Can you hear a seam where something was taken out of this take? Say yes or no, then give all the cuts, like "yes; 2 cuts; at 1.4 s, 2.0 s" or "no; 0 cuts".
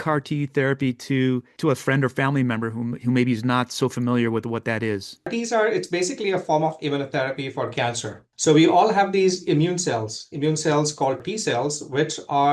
yes; 3 cuts; at 5.3 s, 8.3 s, 11.2 s